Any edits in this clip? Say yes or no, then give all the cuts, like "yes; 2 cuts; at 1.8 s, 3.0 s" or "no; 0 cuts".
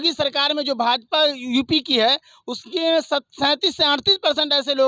no; 0 cuts